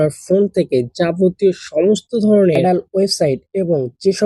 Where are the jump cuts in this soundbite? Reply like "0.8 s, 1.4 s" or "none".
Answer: 2.6 s